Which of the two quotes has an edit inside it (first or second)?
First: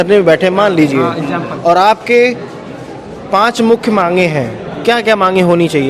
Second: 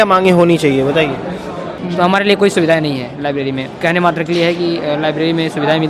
second